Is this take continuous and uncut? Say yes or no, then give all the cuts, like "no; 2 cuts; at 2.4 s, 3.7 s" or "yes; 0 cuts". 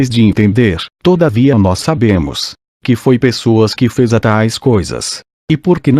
no; 1 cut; at 4.4 s